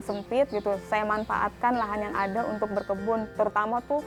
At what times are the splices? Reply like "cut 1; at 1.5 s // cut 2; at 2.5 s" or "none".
none